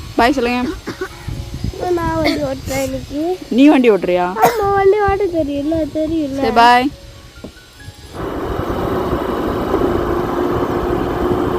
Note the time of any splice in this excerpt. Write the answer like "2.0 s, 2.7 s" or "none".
8.2 s